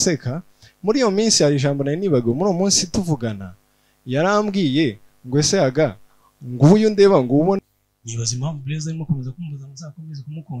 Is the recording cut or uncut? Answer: cut